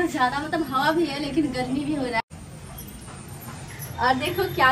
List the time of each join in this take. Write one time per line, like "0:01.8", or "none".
0:02.2